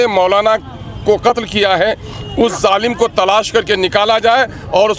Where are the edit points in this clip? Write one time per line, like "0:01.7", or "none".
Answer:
none